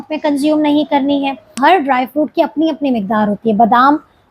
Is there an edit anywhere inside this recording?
yes; 1 cut; at 1.5 s

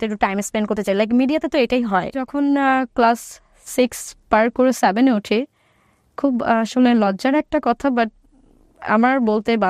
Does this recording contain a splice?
yes; 1 cut; at 2.3 s

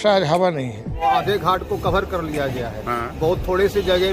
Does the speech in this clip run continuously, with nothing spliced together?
no; 1 cut; at 1.0 s

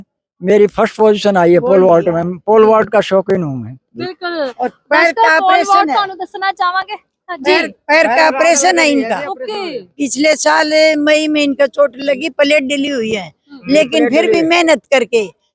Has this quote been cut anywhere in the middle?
no; 0 cuts

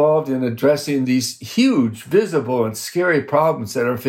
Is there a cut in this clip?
yes; 1 cut; at 1.0 s

